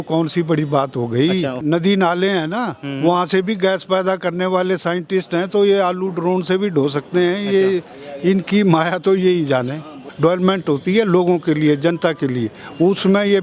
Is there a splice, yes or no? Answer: yes